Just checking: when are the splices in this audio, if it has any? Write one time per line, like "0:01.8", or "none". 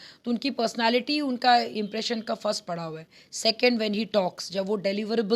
none